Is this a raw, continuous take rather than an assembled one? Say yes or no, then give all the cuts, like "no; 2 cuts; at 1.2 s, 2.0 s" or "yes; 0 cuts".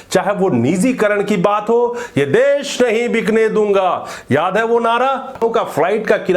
no; 1 cut; at 5.4 s